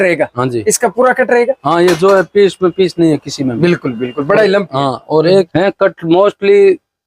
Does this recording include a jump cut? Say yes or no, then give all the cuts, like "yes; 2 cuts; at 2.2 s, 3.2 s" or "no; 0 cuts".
yes; 1 cut; at 5.5 s